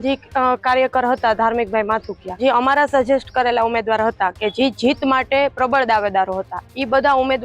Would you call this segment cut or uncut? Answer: cut